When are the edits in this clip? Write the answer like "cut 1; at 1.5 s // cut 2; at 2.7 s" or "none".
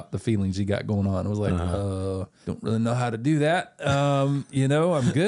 cut 1; at 2.4 s